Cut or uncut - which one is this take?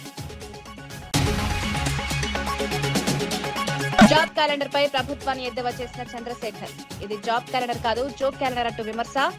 cut